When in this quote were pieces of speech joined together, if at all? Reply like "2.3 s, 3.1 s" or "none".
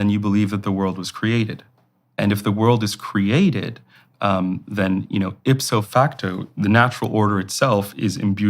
5.9 s